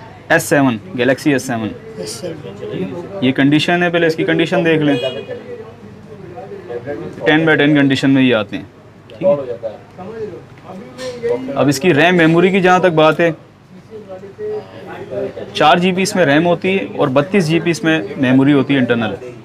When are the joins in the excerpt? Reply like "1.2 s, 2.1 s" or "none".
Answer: none